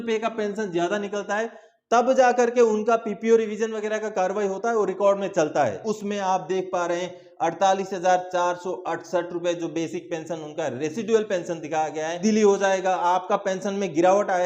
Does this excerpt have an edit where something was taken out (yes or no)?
yes